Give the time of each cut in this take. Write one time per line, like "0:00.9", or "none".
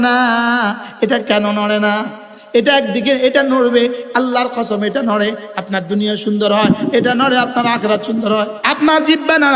0:08.6

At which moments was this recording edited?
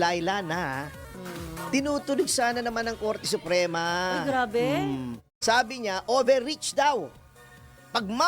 0:05.3

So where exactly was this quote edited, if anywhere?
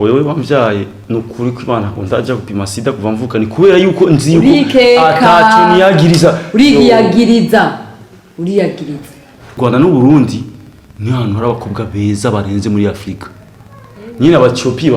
0:09.6

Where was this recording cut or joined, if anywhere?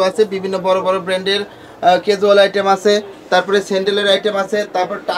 none

